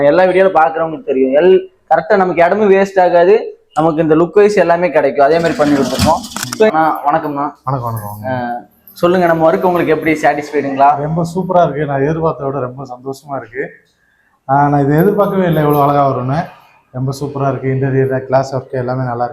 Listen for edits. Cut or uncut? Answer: cut